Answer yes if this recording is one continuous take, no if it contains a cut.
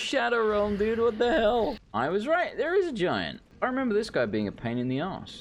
no